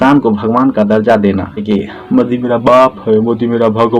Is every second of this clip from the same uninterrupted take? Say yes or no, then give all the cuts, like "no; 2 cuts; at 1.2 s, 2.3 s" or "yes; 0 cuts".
no; 1 cut; at 1.6 s